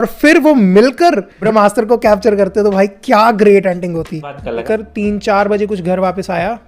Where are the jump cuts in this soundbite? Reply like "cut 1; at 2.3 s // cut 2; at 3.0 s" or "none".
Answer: cut 1; at 1.3 s // cut 2; at 4.5 s